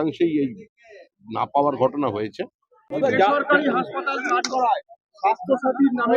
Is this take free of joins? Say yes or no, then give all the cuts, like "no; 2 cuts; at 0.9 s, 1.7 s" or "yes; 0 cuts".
no; 1 cut; at 2.9 s